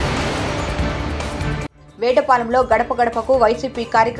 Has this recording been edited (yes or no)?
no